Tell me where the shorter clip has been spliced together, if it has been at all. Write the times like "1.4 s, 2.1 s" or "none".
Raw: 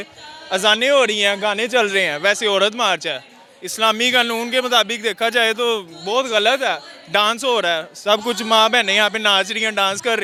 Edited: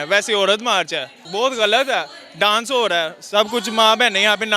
1.2 s